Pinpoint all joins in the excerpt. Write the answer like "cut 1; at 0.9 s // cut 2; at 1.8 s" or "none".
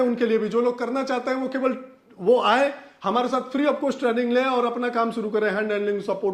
none